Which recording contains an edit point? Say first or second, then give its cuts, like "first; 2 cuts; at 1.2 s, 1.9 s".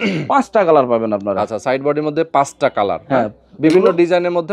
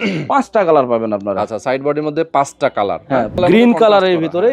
second; 1 cut; at 3.4 s